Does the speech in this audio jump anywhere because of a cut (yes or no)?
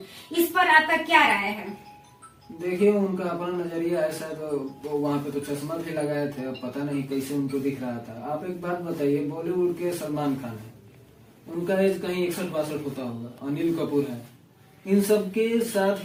no